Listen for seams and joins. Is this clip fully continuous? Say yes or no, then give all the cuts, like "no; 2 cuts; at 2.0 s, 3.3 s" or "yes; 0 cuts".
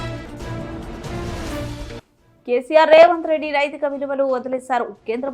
no; 1 cut; at 1.9 s